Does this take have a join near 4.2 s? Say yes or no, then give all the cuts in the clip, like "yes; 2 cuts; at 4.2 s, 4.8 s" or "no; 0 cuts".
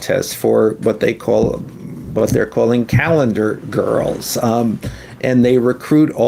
no; 0 cuts